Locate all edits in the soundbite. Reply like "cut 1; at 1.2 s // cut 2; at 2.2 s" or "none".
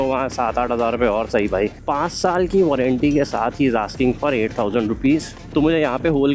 cut 1; at 1.8 s // cut 2; at 5.4 s